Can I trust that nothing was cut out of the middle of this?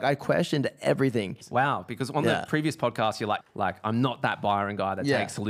no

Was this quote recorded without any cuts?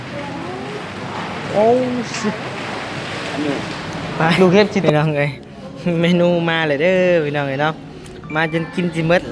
no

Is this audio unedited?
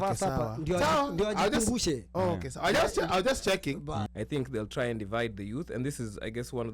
no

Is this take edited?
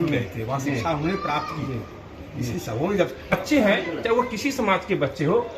yes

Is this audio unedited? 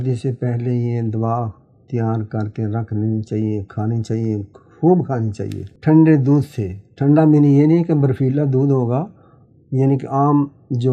yes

